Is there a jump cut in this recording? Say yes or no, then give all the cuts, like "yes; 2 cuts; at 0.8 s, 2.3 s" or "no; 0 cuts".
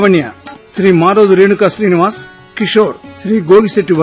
yes; 1 cut; at 2.6 s